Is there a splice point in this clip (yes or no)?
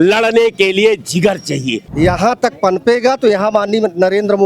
yes